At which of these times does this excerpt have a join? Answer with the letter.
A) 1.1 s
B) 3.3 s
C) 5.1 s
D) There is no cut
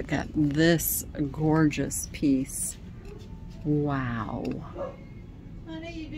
D